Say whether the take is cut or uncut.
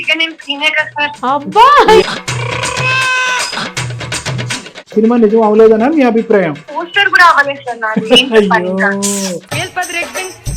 cut